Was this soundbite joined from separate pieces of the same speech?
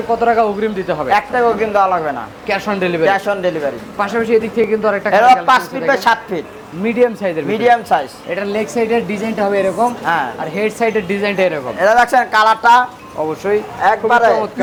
no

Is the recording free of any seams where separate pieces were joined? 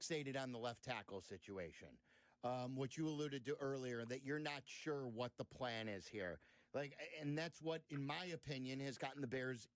yes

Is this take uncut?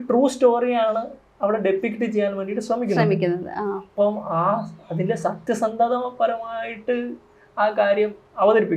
yes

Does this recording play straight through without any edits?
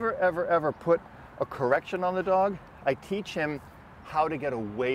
yes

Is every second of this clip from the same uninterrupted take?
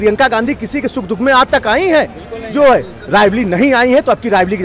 yes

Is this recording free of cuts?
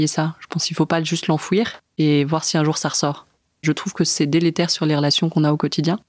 no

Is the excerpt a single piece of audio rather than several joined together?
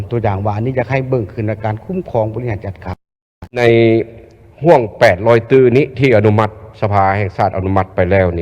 no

